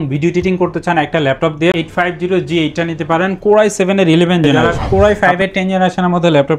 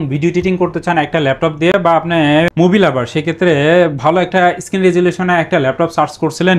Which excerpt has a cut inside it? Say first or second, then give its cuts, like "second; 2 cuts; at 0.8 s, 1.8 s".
first; 2 cuts; at 1.7 s, 4.7 s